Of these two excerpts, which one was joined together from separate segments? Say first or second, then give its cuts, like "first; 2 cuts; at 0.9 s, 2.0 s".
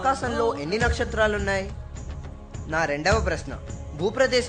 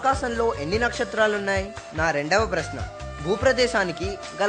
second; 1 cut; at 1.8 s